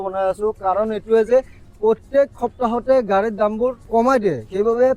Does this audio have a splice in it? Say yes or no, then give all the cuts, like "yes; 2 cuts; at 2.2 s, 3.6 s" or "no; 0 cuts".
yes; 1 cut; at 3.8 s